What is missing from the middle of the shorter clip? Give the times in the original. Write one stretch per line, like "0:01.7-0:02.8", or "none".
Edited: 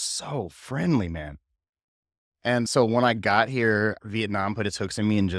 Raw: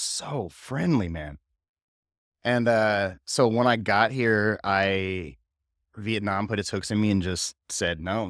0:02.6-0:03.3
0:04.6-0:05.9